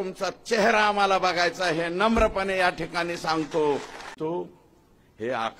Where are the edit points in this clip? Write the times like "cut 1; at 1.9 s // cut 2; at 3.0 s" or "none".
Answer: cut 1; at 4.1 s